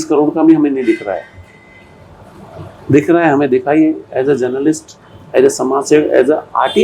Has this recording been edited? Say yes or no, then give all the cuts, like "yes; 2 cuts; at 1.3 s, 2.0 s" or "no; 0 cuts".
no; 0 cuts